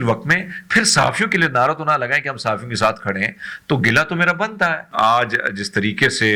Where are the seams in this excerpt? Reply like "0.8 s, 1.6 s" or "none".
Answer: 4.8 s